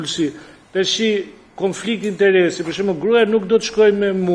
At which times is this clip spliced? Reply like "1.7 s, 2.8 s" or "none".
none